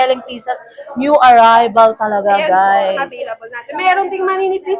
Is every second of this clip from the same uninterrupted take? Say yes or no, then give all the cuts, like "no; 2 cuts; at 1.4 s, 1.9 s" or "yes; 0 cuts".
yes; 0 cuts